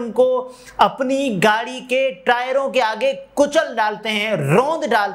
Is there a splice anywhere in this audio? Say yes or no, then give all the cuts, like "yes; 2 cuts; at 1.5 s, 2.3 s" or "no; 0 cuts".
no; 0 cuts